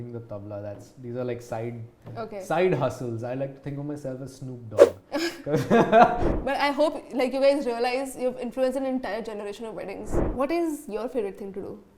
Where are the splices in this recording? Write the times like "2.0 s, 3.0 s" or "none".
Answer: 6.3 s, 10.1 s